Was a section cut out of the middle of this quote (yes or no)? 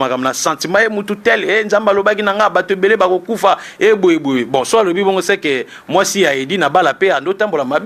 no